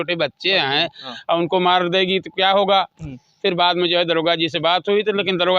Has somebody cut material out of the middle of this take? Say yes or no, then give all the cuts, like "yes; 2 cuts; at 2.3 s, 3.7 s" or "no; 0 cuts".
no; 0 cuts